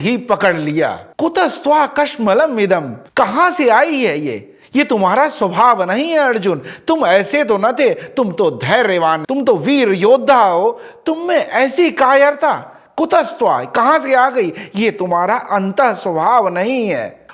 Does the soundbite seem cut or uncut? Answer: uncut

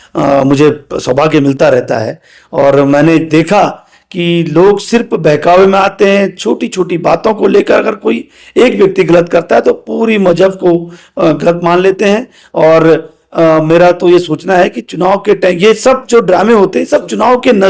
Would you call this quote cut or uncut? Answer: uncut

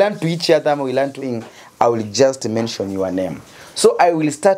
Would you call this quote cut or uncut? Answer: cut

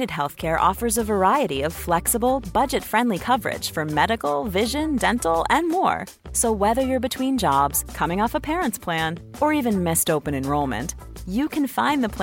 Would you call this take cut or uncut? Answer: uncut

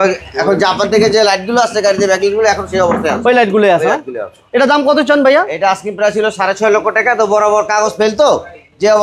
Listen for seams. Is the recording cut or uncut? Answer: uncut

